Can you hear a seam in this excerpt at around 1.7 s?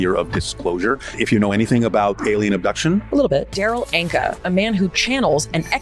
no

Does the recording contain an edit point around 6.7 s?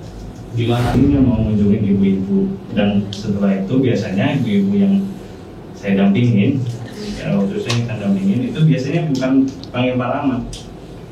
no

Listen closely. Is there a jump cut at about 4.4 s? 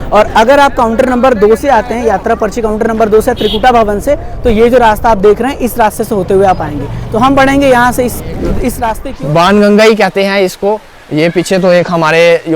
no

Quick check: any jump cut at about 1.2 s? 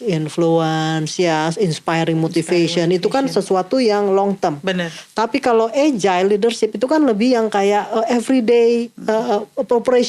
no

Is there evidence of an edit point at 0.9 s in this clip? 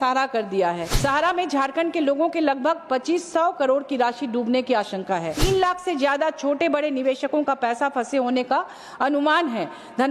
yes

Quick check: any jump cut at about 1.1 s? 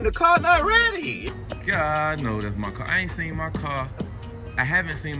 yes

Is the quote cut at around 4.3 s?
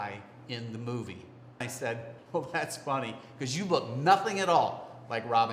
no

